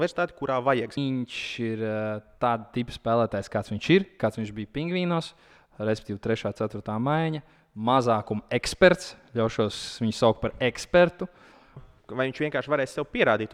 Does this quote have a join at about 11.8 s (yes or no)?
yes